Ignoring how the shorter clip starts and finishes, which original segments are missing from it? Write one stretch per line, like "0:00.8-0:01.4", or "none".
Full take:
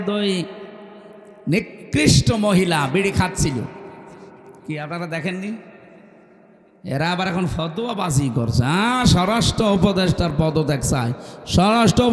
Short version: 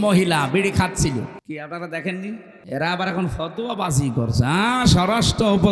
0:03.8-0:04.6
0:05.7-0:06.7